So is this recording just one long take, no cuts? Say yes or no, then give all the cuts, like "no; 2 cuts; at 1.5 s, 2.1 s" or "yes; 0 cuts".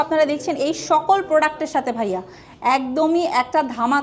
yes; 0 cuts